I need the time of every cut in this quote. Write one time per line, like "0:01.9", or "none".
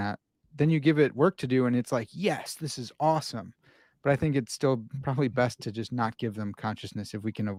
none